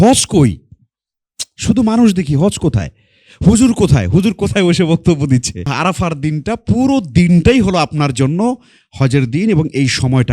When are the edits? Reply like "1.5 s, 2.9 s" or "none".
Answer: 5.7 s